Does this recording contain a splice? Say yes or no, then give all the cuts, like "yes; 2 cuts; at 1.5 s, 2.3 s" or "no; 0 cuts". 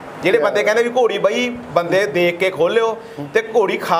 no; 0 cuts